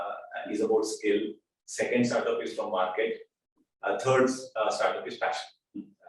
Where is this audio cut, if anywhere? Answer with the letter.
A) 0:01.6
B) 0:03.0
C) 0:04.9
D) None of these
D